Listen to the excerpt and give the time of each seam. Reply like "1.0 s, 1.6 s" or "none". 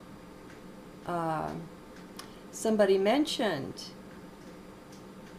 none